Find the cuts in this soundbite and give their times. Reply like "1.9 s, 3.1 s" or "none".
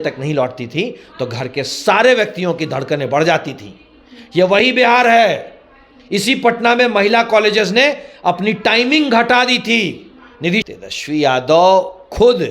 10.6 s